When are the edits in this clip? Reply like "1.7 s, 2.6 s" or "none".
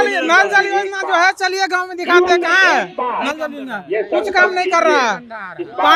none